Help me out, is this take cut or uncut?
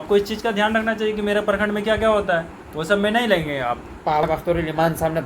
cut